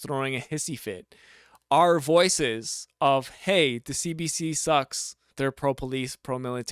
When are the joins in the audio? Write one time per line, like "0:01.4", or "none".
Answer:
0:05.3